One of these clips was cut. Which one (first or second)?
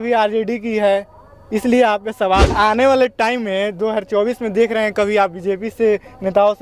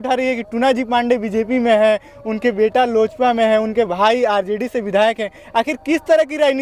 first